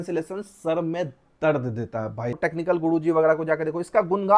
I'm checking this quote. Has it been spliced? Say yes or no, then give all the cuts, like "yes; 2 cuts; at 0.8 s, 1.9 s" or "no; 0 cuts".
yes; 1 cut; at 2.3 s